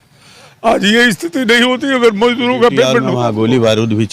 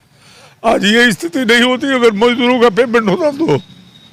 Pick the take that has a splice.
first; 1 cut; at 3.1 s

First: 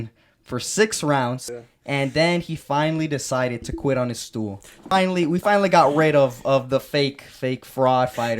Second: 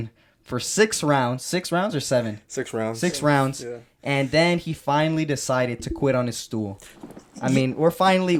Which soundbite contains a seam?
first; 2 cuts; at 1.4 s, 4.9 s

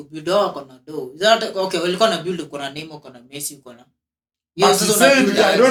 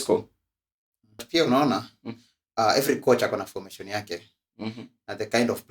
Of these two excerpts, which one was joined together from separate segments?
second; 1 cut; at 1.2 s

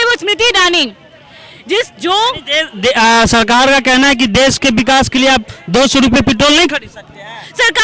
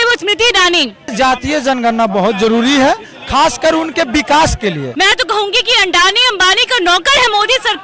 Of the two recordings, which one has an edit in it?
second; 2 cuts; at 1.1 s, 4.9 s

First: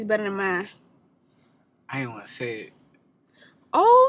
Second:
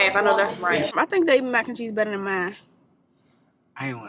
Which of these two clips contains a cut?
second; 1 cut; at 0.9 s

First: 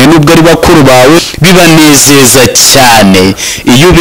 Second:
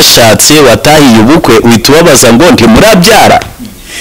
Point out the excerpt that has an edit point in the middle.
first; 1 cut; at 1.2 s

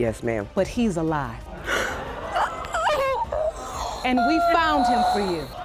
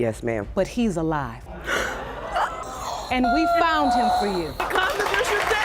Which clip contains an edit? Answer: second; 2 cuts; at 2.7 s, 4.6 s

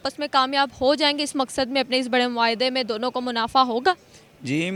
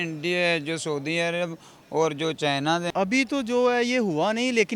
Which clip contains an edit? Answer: second; 1 cut; at 2.9 s

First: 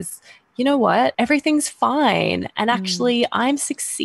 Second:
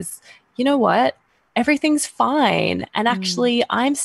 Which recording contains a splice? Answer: first; 1 cut; at 1.1 s

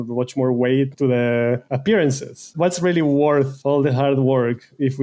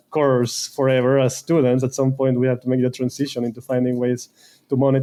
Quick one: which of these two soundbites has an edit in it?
first; 4 cuts; at 0.9 s, 1.7 s, 2.5 s, 3.5 s

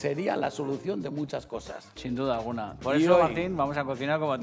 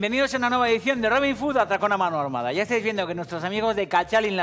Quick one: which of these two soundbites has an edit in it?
second; 1 cut; at 3.5 s

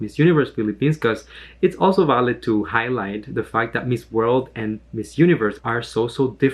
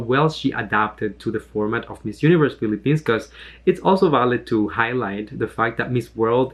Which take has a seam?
first; 1 cut; at 5.6 s

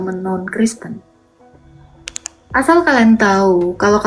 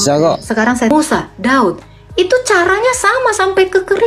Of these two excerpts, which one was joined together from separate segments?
second; 1 cut; at 0.9 s

